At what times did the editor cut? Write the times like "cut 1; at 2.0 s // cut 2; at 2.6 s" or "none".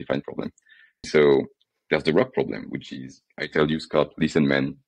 cut 1; at 1.1 s

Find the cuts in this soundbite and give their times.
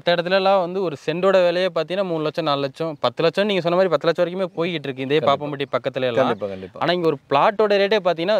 none

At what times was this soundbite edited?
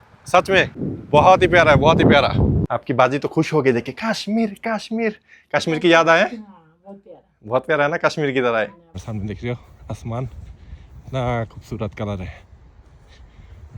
cut 1; at 0.8 s // cut 2; at 2.7 s // cut 3; at 9.0 s

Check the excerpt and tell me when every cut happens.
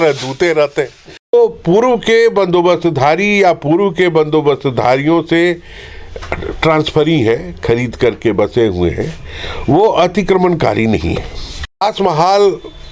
cut 1; at 1.3 s // cut 2; at 11.8 s

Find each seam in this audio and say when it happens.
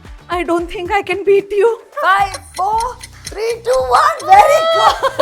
cut 1; at 1.9 s

